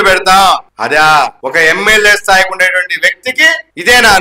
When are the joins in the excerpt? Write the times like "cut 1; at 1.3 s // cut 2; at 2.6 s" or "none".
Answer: cut 1; at 1.1 s